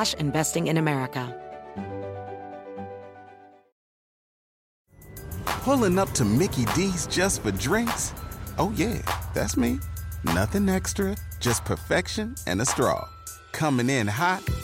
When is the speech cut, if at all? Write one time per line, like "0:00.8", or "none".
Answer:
0:01.3